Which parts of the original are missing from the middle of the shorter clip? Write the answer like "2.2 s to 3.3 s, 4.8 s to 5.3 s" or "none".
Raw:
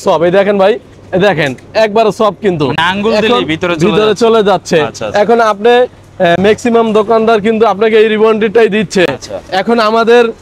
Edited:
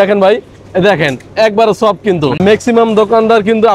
2.8 s to 6.4 s